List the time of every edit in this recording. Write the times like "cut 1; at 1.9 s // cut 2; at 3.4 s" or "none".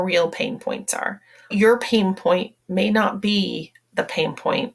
cut 1; at 1.5 s